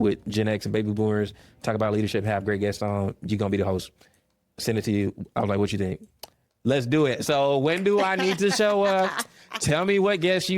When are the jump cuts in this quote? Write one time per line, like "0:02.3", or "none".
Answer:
none